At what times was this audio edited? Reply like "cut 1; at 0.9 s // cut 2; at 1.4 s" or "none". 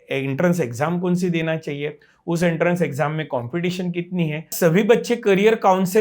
cut 1; at 4.5 s